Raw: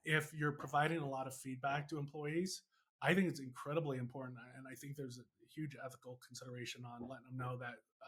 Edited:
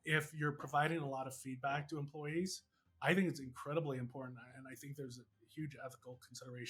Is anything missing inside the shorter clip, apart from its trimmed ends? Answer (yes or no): no